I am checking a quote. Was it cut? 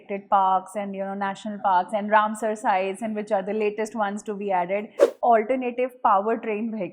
yes; 1 cut; at 5.0 s

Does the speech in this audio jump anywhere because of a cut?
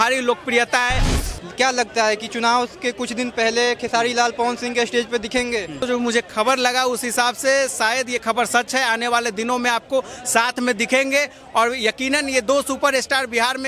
yes; 2 cuts; at 1.1 s, 5.8 s

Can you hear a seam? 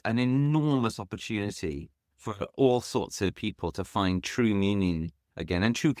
no; 0 cuts

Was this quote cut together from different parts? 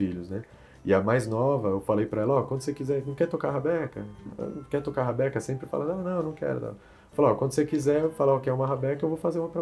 no; 0 cuts

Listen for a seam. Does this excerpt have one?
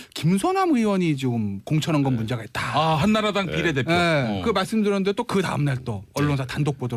yes; 1 cut; at 5.2 s

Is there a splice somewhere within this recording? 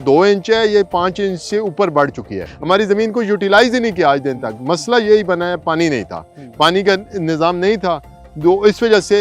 yes; 1 cut; at 2.5 s

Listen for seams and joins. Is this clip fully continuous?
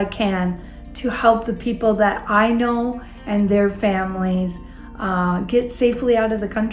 yes; 0 cuts

